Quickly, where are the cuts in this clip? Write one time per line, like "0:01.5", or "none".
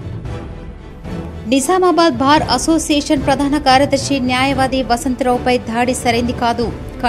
0:01.4